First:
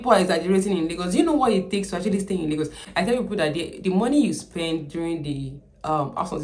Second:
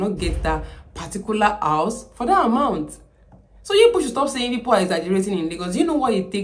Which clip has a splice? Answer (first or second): first